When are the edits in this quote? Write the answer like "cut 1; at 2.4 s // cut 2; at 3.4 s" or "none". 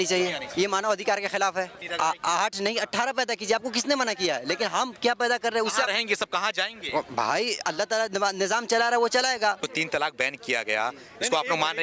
cut 1; at 1.8 s // cut 2; at 9.6 s